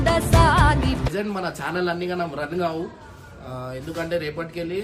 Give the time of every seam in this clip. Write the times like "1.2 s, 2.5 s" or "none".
1.1 s